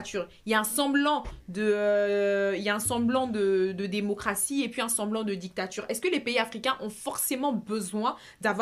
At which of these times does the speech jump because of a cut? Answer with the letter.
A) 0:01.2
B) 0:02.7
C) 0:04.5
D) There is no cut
D